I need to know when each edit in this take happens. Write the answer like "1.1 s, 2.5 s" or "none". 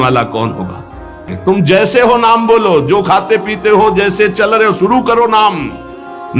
1.3 s